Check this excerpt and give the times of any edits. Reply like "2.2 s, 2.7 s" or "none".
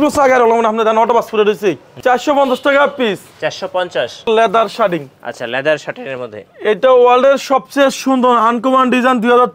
1.9 s, 4.3 s